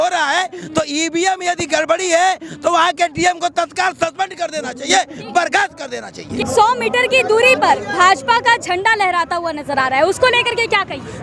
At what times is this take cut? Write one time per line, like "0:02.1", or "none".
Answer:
none